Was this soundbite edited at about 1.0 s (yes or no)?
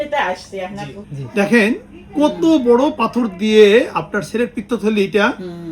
yes